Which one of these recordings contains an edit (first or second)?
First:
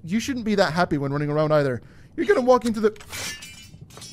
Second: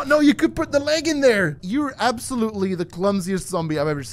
second